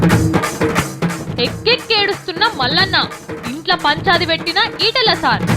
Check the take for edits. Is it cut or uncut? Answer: cut